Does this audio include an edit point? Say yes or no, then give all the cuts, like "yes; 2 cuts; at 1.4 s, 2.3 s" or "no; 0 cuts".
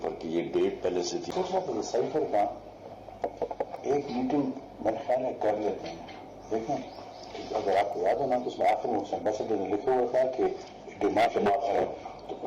yes; 1 cut; at 1.2 s